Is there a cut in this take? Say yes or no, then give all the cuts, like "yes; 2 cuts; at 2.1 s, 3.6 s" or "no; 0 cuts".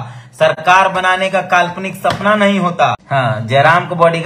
yes; 1 cut; at 3.0 s